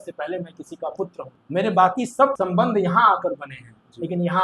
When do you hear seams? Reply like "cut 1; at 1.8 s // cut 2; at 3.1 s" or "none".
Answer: cut 1; at 1.3 s // cut 2; at 2.3 s